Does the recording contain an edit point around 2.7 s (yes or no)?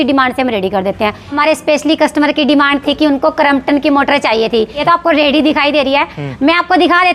no